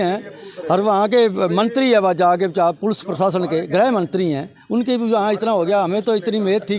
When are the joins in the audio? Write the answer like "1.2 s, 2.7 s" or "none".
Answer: none

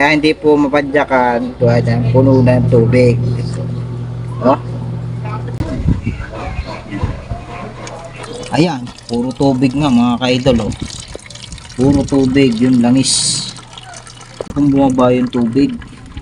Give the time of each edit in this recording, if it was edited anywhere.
5.5 s, 14.5 s

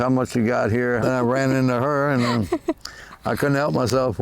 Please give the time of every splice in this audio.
1.0 s

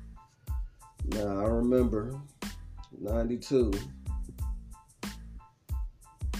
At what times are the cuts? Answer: 1.0 s

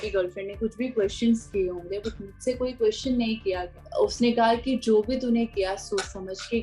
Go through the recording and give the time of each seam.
3.8 s

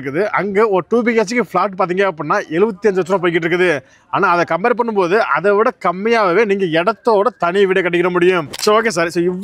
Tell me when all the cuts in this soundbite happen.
8.5 s

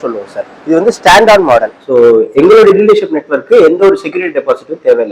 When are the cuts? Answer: 1.8 s

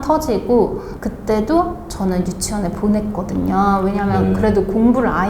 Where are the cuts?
0.9 s

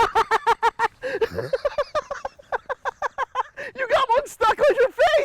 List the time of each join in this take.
3.6 s

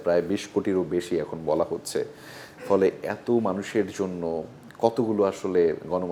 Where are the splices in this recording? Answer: none

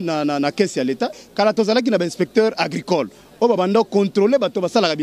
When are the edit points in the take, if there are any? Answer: 1.1 s

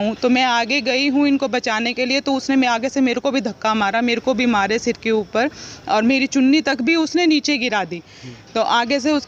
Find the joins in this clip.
none

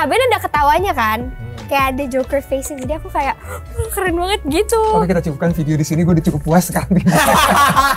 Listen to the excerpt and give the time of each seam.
none

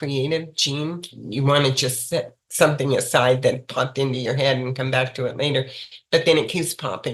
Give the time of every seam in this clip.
1.2 s

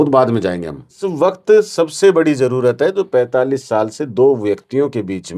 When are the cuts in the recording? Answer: 1.0 s

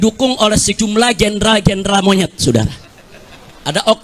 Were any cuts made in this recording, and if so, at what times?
none

